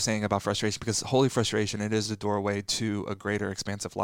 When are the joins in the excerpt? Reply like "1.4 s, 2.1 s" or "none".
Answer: none